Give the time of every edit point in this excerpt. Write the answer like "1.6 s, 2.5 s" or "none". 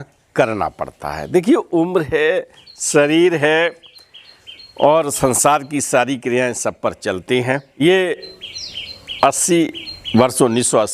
7.8 s